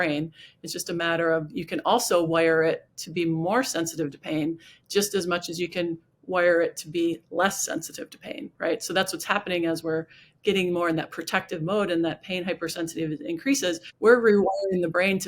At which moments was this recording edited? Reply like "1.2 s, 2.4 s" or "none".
13.9 s